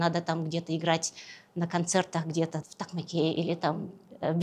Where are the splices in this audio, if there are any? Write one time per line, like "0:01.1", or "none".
0:02.6

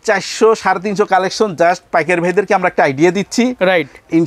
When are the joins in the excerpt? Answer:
none

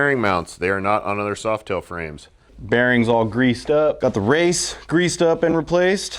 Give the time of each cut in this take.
0:02.5

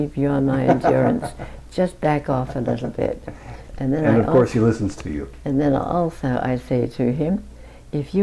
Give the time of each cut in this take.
none

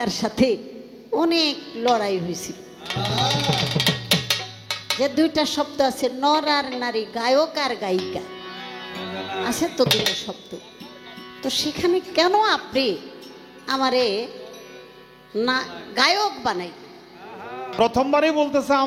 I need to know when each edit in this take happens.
0:17.8

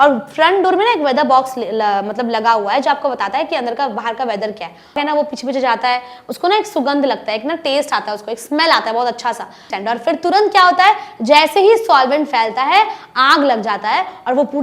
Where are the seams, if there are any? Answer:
0:05.0
0:09.7

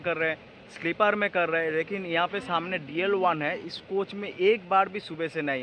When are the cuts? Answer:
none

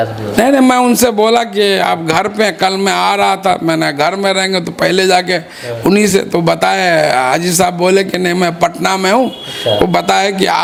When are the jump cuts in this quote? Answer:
none

